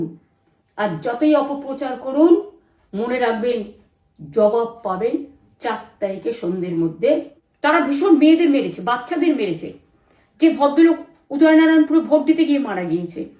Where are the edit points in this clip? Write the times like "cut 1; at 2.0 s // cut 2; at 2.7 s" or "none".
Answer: cut 1; at 7.4 s